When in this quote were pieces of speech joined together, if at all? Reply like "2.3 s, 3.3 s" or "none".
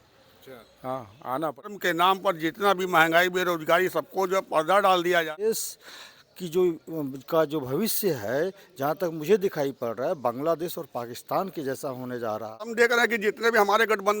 1.7 s, 5.5 s, 12.7 s